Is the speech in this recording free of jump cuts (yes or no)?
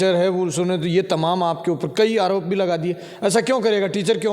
yes